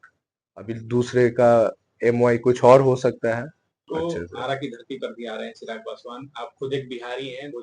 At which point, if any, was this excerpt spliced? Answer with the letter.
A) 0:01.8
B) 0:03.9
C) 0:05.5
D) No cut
B